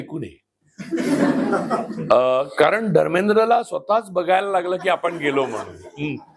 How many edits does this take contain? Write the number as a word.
zero